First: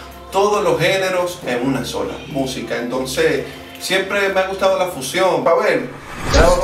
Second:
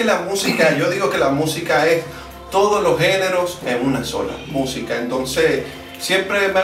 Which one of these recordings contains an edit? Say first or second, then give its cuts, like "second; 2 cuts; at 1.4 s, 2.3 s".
first; 1 cut; at 5.4 s